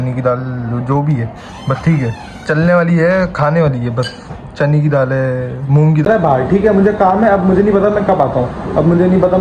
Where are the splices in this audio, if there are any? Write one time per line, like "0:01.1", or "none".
0:06.1